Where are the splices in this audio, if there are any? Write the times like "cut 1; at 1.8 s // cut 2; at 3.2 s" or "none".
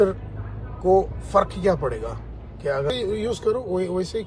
cut 1; at 2.9 s

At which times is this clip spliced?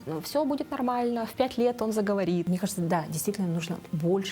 cut 1; at 2.4 s

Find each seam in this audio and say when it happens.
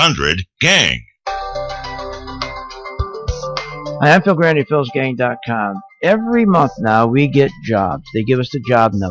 cut 1; at 1.1 s

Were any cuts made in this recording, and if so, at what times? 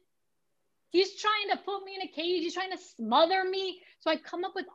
none

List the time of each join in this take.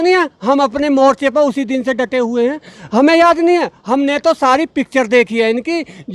none

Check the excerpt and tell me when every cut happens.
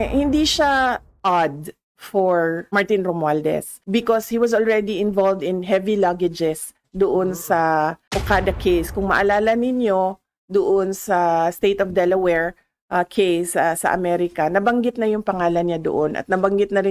cut 1; at 1.1 s // cut 2; at 2.6 s // cut 3; at 3.7 s // cut 4; at 8.1 s

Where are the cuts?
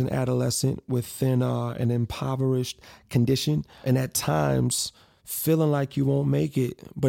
cut 1; at 3.8 s

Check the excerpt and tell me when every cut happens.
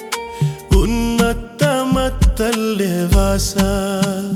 none

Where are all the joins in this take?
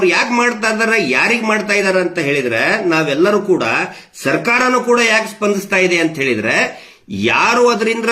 none

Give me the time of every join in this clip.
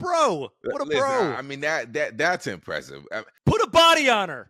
cut 1; at 3.3 s

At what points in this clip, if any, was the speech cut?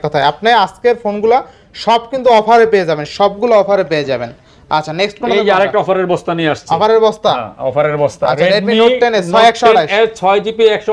none

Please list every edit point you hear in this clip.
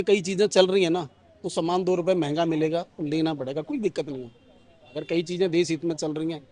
none

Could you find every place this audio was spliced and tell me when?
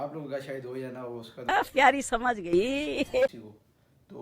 cut 1; at 1.4 s // cut 2; at 3.4 s

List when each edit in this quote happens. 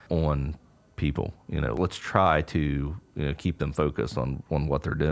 cut 1; at 1.8 s

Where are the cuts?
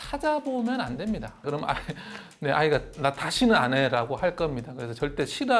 cut 1; at 1.4 s

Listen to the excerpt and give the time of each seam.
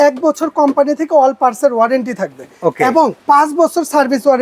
cut 1; at 3.2 s

